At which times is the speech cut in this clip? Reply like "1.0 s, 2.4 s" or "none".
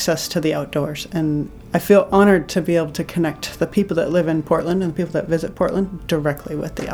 1.6 s